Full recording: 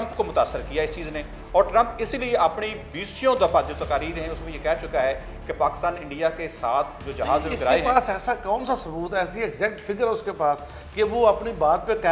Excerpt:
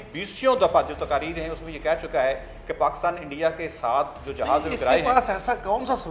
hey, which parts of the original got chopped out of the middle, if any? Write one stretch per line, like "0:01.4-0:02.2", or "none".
none